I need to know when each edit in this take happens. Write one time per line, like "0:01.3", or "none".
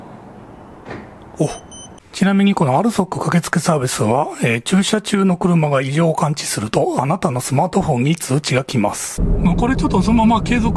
0:02.0
0:09.2